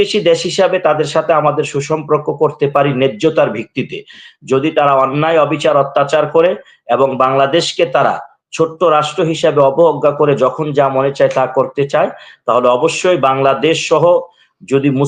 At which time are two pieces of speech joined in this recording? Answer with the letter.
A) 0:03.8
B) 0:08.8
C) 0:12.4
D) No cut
D